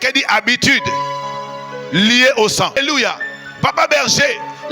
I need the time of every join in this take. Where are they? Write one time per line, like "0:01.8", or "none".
0:02.8